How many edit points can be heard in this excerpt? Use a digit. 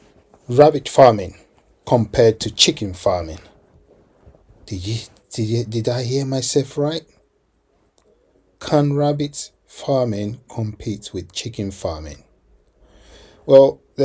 0